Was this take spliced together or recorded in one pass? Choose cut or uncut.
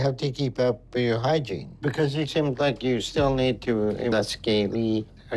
uncut